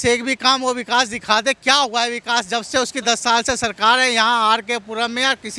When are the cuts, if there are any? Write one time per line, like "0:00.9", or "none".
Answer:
none